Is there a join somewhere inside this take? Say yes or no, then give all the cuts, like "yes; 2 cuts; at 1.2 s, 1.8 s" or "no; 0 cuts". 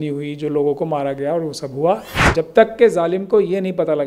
yes; 1 cut; at 2.3 s